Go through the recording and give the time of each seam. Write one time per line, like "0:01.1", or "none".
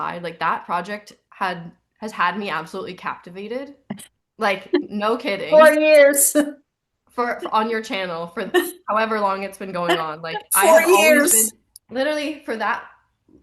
0:04.2